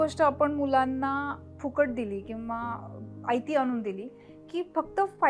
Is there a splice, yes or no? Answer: no